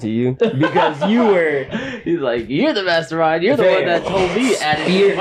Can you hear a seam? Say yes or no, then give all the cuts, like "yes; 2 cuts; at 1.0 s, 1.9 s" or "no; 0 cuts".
no; 0 cuts